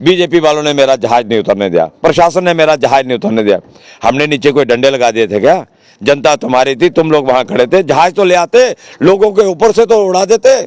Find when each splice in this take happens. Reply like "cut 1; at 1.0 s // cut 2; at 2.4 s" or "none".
none

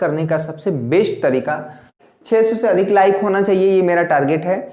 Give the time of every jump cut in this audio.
cut 1; at 1.9 s

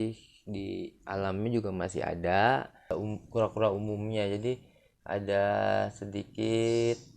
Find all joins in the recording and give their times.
cut 1; at 2.9 s

